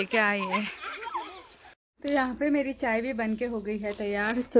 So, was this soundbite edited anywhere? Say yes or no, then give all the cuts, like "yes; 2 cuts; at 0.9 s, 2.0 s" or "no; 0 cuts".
yes; 1 cut; at 2.0 s